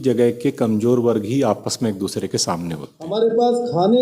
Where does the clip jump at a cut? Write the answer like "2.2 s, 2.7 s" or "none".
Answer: 3.0 s